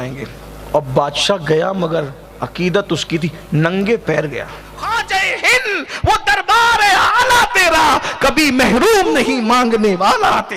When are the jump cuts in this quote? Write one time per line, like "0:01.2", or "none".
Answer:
0:04.7